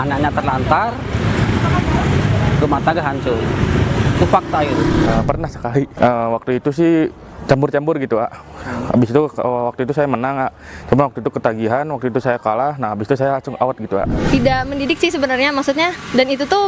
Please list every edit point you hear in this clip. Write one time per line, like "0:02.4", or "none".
0:05.1
0:14.2